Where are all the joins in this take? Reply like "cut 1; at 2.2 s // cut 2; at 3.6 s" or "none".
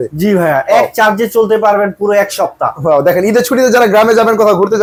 none